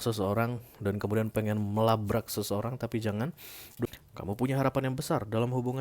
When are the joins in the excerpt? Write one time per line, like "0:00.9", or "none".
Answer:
0:03.9